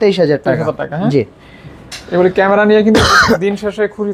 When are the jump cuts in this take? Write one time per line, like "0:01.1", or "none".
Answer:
none